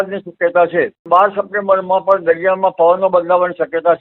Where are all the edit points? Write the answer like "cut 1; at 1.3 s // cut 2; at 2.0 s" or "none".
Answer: cut 1; at 1.0 s